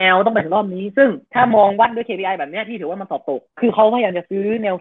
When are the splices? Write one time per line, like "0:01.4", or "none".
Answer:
0:01.2
0:03.5